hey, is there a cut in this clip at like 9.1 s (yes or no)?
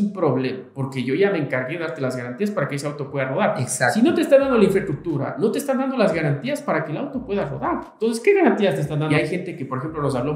yes